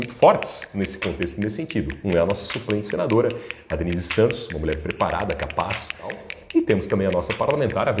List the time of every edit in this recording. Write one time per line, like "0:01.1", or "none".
0:06.3